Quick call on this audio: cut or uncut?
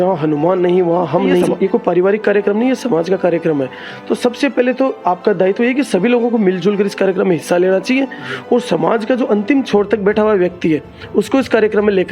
cut